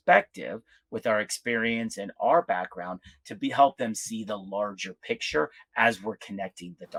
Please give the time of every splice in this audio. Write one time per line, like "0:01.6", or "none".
none